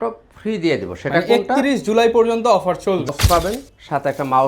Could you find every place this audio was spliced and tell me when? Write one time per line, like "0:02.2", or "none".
0:03.1